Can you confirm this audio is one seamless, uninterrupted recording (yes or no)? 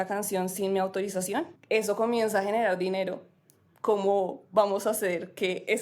no